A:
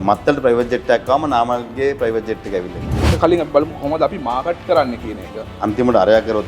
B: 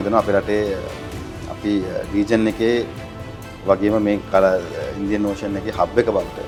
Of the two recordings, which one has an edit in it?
A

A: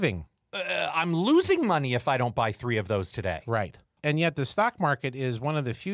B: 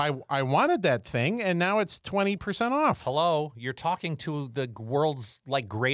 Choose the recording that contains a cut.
A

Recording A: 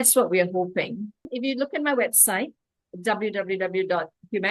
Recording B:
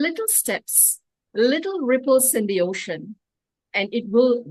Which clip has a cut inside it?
A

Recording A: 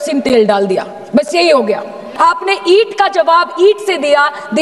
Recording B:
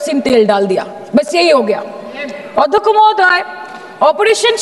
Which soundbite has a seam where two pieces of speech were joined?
A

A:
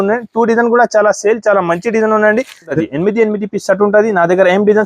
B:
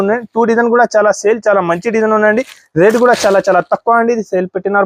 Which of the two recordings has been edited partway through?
A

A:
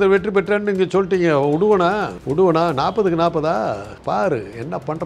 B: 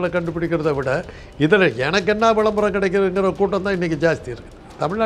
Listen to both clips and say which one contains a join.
A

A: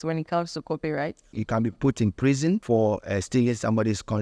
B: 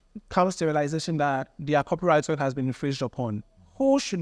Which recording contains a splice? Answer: A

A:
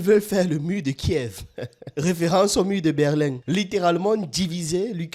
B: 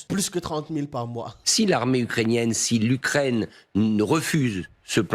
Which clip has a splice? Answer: B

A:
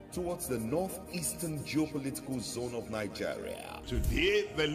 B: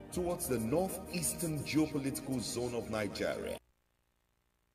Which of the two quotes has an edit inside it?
B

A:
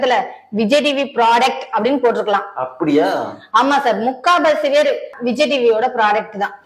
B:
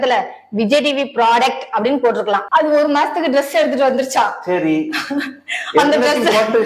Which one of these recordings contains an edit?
B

